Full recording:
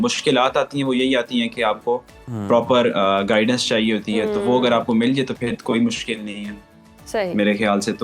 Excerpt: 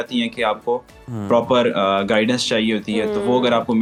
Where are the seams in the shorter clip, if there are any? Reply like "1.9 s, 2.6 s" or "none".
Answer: none